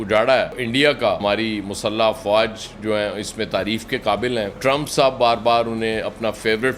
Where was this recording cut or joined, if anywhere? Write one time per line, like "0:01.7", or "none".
0:01.2
0:04.5